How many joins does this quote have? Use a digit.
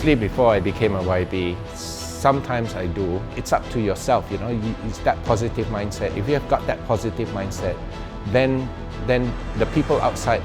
1